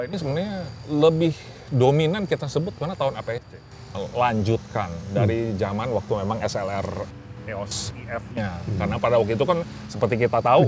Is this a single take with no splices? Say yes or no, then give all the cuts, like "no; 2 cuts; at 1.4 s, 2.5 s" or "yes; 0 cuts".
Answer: no; 1 cut; at 3.9 s